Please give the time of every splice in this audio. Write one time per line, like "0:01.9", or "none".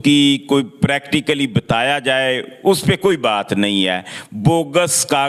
none

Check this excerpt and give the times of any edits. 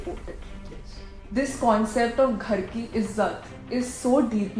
none

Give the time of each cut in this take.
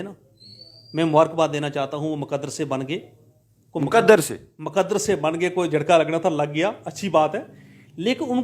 none

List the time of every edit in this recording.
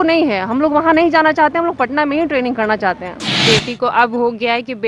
0:03.3

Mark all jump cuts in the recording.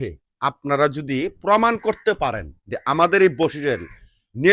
none

